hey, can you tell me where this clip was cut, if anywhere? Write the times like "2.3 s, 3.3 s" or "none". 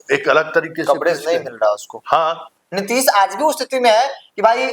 2.6 s